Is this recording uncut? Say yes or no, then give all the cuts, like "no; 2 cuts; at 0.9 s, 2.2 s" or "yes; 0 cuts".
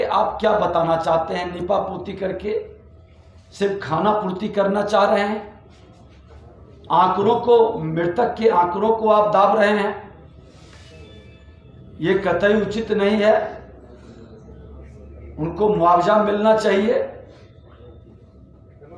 yes; 0 cuts